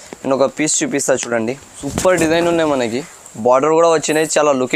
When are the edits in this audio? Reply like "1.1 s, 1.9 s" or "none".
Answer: 1.7 s